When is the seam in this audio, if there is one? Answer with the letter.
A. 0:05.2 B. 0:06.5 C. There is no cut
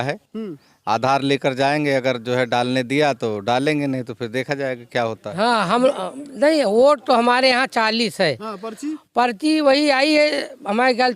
A